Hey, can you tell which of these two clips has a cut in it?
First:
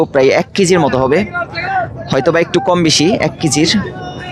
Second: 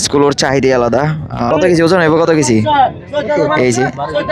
second; 1 cut; at 1.5 s

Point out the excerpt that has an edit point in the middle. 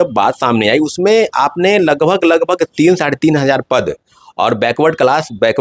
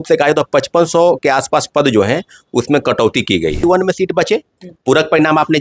second; 1 cut; at 3.6 s

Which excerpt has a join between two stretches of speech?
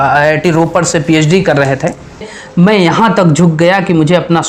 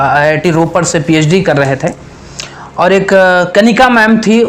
first; 1 cut; at 2.4 s

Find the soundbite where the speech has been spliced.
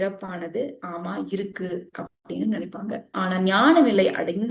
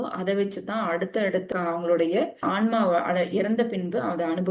second; 1 cut; at 1.5 s

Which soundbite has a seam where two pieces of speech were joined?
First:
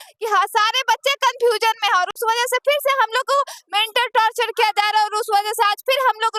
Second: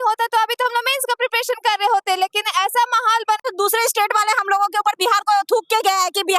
second; 1 cut; at 3.4 s

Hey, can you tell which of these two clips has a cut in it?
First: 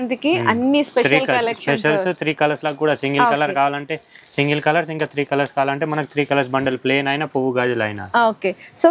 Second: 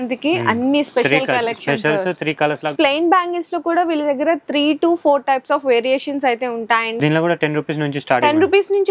second; 2 cuts; at 2.7 s, 6.9 s

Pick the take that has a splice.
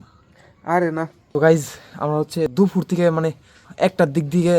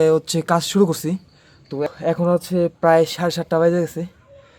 first; 3 cuts; at 1.2 s, 2.5 s, 3.7 s

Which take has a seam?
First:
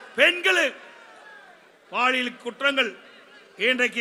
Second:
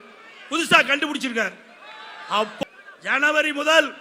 second; 1 cut; at 2.6 s

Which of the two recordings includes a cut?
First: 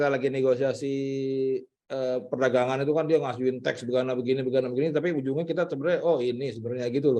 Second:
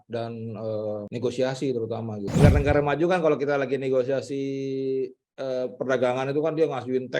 second; 2 cuts; at 1.1 s, 2.2 s

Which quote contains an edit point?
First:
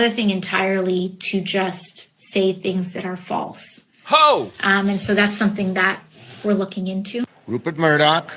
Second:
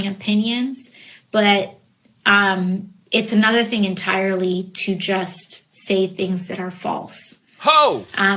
first; 1 cut; at 7.3 s

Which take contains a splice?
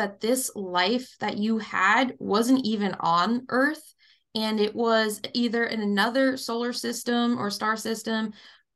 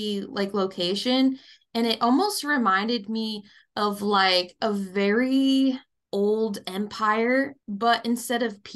second; 2 cuts; at 5.9 s, 7.6 s

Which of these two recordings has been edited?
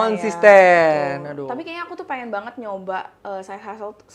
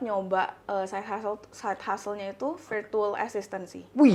first; 1 cut; at 1.4 s

